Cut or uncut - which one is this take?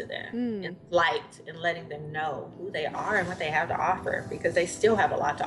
uncut